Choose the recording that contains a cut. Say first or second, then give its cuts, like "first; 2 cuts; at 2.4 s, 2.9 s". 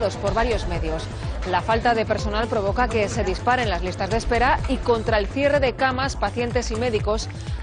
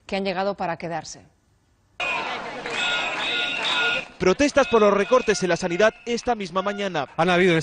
second; 1 cut; at 1.2 s